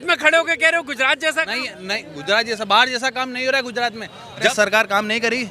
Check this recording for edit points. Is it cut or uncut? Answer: cut